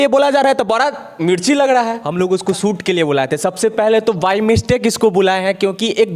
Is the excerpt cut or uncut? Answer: cut